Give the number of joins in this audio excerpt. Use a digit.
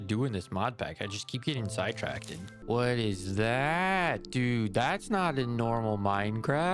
1